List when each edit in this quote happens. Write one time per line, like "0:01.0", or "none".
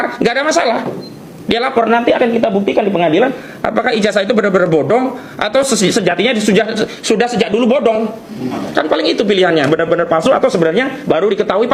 none